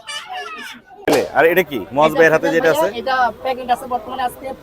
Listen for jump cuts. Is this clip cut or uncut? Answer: cut